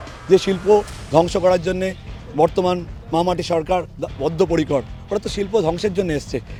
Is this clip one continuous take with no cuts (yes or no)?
yes